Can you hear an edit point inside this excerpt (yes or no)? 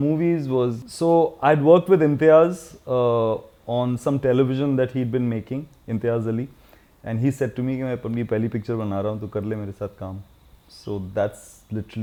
no